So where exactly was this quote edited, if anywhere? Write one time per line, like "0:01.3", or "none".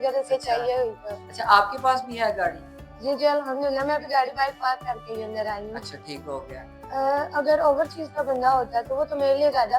0:06.6